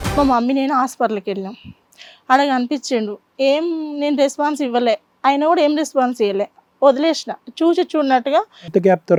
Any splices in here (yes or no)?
no